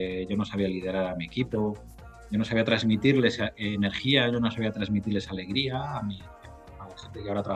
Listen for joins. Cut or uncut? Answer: uncut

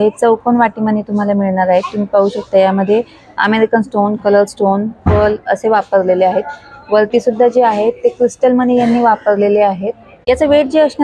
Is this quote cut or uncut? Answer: uncut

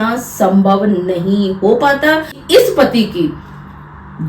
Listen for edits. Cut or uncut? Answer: cut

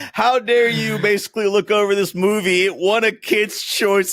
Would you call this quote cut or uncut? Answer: uncut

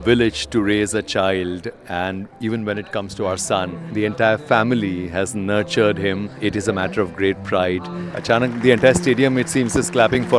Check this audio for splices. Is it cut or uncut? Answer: cut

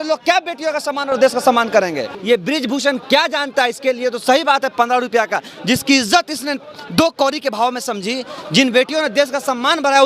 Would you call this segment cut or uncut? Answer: cut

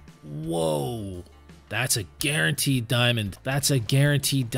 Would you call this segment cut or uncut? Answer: cut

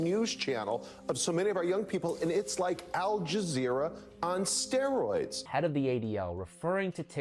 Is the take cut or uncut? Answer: cut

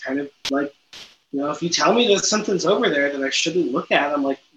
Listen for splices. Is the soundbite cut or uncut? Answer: uncut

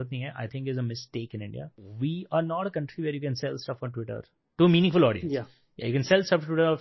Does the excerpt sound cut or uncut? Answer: cut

